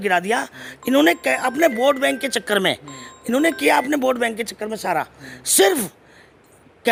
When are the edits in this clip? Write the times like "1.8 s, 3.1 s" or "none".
none